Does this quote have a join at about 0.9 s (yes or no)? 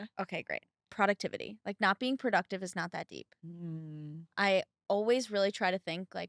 yes